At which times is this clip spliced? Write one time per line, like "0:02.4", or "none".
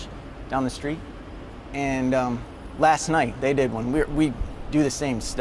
0:04.1